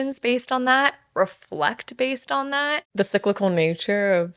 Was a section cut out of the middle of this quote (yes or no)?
yes